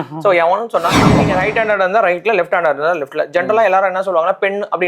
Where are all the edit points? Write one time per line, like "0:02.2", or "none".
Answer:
0:01.2